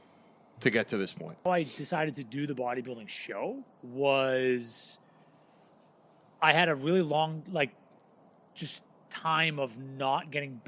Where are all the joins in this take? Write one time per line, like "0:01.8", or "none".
0:01.4